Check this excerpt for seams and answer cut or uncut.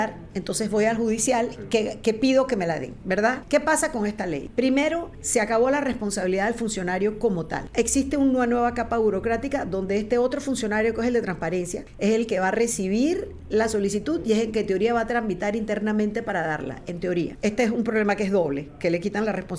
cut